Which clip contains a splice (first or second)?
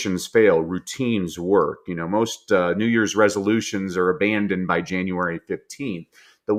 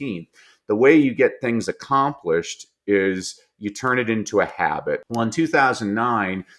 second